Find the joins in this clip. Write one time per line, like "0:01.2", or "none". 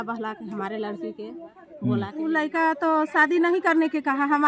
0:02.1